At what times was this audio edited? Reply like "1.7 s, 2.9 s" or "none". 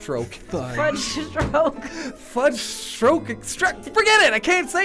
none